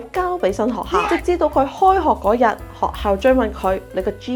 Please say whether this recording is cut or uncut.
uncut